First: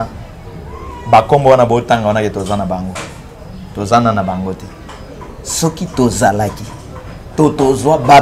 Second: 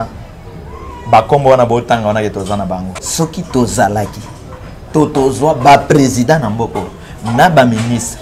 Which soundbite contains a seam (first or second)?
second